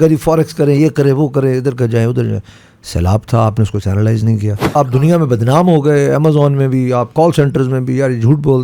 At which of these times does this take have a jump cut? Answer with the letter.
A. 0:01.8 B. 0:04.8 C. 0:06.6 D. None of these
B